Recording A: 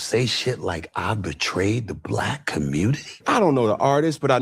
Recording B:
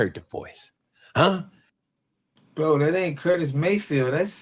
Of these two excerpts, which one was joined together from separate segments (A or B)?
A